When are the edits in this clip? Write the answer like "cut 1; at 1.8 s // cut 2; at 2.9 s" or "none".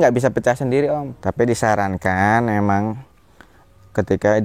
cut 1; at 1.2 s